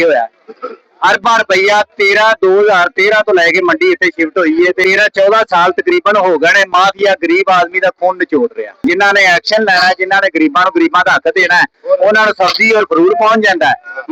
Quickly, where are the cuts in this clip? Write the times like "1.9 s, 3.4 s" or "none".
4.8 s, 8.7 s